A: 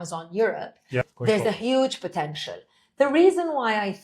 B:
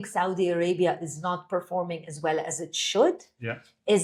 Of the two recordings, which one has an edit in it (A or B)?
A